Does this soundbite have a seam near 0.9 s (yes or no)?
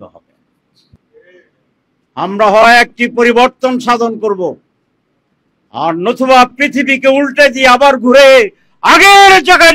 yes